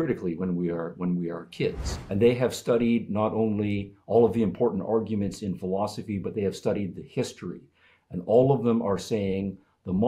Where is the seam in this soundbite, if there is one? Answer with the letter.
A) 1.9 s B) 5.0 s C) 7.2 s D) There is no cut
A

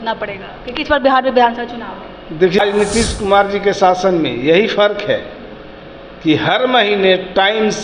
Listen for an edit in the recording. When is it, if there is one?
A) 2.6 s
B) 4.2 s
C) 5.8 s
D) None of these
A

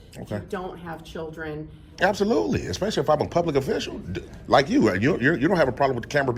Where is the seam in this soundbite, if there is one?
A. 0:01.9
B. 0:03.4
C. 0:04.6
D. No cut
A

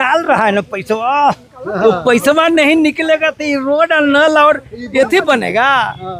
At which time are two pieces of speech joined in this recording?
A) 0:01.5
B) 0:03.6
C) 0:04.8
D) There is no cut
D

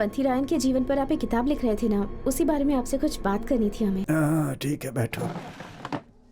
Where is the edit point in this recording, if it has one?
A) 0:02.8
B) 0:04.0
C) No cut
B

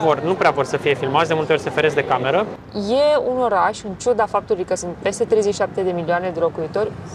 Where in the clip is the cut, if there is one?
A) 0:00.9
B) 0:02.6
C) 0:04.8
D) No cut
B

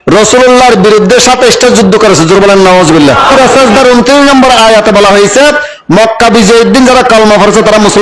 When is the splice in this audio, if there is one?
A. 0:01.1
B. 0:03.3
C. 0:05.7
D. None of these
B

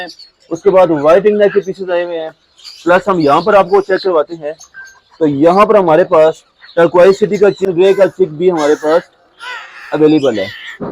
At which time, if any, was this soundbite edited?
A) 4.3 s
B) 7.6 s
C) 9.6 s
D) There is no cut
B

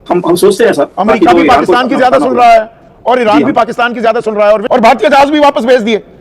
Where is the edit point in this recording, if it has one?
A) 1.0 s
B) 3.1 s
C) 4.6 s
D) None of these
C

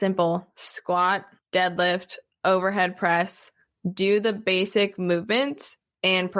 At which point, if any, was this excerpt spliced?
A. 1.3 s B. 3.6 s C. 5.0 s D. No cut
A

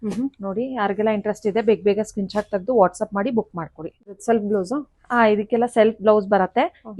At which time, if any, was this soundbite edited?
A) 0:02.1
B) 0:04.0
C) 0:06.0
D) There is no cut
B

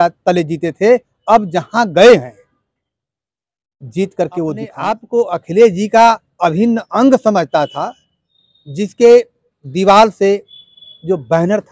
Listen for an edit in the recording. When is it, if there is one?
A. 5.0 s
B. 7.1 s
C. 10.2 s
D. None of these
A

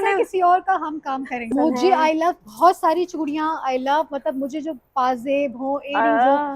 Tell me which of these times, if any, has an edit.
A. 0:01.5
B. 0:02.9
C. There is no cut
A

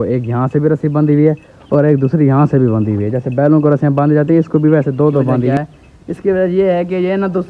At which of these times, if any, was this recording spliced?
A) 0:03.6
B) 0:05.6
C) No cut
B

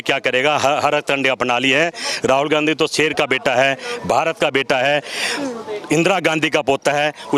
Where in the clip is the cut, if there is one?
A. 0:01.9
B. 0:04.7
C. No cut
C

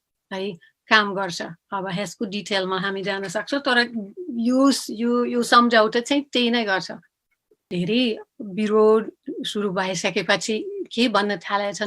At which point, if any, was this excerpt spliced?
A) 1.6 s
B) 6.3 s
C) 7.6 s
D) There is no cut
C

